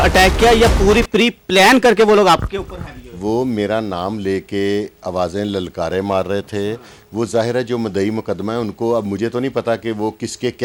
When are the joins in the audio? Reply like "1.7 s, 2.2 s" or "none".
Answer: none